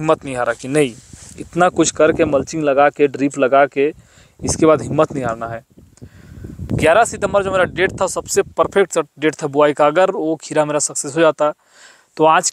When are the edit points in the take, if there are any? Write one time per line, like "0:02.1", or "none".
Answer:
0:06.7

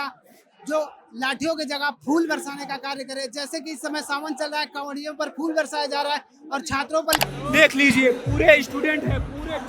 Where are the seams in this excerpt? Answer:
0:07.2

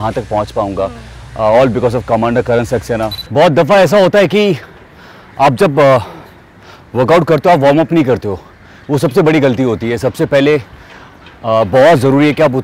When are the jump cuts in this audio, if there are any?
0:03.2

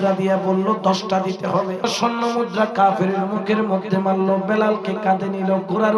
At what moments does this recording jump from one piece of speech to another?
0:01.9

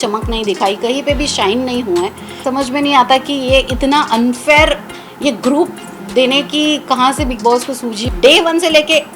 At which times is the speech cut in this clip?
0:02.3
0:08.0

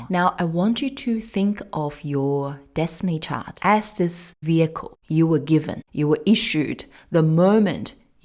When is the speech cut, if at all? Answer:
0:03.5
0:04.3
0:04.9
0:05.8

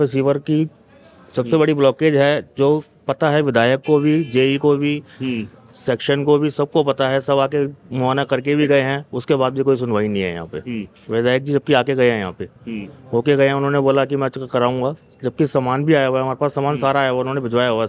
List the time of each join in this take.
none

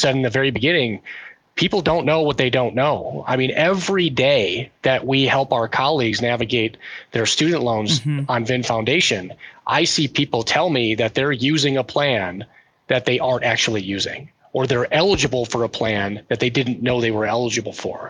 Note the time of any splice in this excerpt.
none

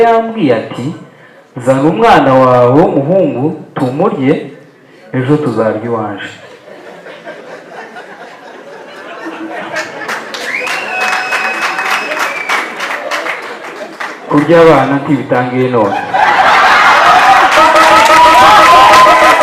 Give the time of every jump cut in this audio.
none

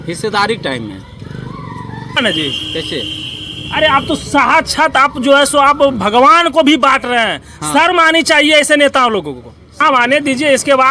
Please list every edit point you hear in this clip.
0:02.2
0:09.8

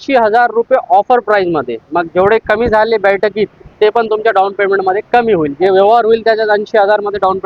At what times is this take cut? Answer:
none

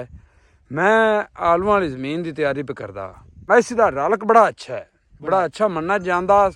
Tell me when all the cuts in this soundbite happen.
0:03.3

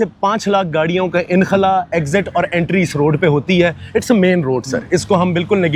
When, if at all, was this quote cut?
none

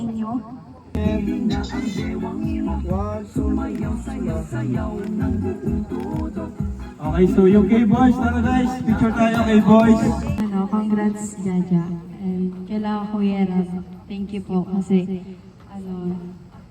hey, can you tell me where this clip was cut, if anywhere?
0:00.9
0:10.4

